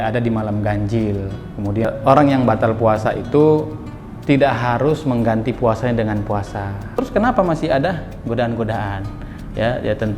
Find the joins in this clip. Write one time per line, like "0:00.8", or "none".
0:01.8
0:07.0